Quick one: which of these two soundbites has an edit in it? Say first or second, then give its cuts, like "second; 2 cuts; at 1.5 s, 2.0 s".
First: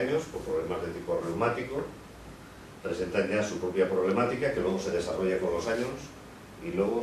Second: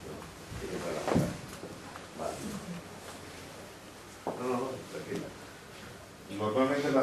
first; 1 cut; at 2.0 s